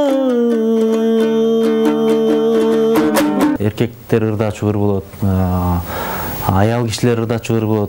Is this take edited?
yes; 1 cut; at 3.6 s

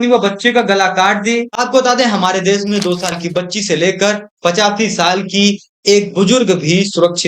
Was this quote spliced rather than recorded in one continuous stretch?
yes; 1 cut; at 1.6 s

